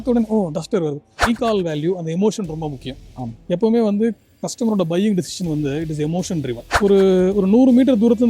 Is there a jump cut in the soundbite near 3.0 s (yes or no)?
no